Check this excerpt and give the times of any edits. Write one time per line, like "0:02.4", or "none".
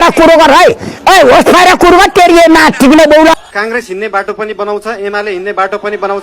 0:03.4

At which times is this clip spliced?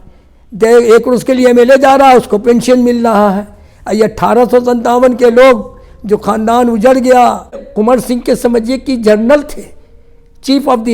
0:07.7

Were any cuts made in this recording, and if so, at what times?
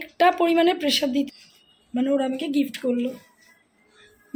0:01.3

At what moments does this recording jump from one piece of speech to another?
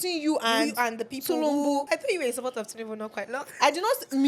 0:01.9

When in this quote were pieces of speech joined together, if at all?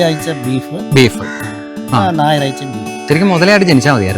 0:02.9

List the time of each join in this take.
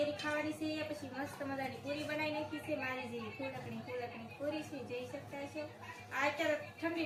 none

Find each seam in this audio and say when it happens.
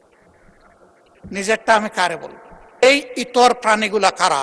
0:02.8

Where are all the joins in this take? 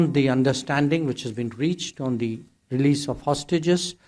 none

